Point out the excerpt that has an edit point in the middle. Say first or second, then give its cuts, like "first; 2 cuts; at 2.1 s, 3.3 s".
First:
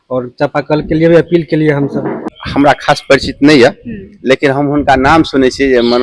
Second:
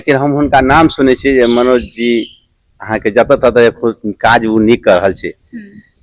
first; 1 cut; at 2.4 s